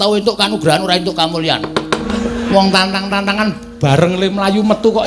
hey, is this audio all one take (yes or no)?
no